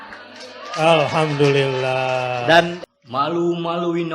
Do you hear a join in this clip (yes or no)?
yes